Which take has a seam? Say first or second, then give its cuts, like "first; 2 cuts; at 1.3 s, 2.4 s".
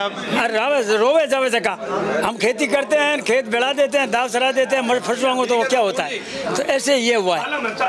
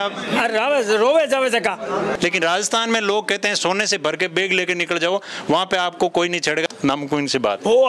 second; 2 cuts; at 2.1 s, 6.7 s